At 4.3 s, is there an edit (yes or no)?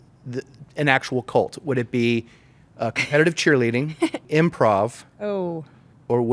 yes